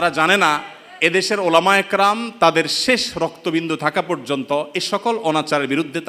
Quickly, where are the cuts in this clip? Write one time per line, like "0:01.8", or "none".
none